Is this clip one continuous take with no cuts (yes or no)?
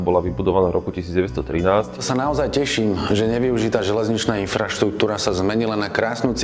no